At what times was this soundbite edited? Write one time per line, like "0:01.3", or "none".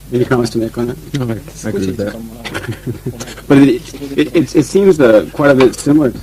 0:04.0

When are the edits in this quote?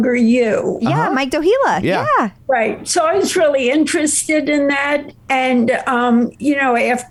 none

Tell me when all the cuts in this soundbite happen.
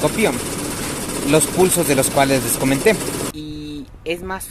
0:03.3

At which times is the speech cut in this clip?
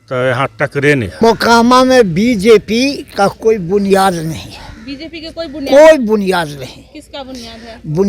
0:01.2

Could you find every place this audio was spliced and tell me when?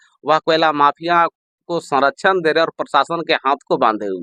none

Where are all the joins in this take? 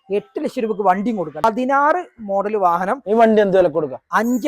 0:01.4

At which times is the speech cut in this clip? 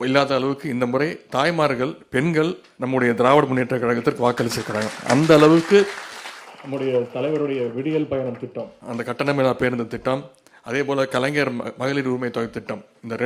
none

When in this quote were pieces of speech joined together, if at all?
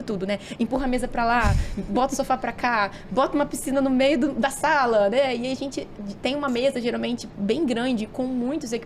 none

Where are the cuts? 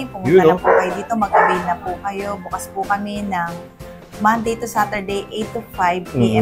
none

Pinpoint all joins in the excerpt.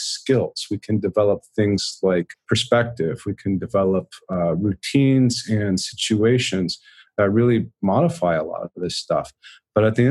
0:02.4

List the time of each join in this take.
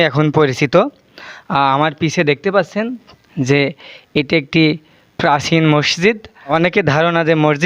0:06.5

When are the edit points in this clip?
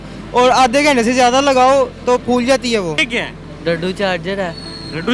0:03.0

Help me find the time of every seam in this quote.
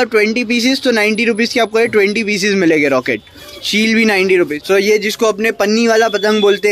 0:03.4
0:04.6

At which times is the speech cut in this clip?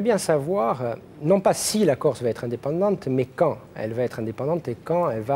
0:01.1

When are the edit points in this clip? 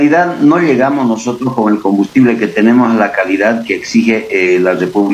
none

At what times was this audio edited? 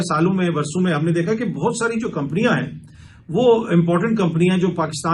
none

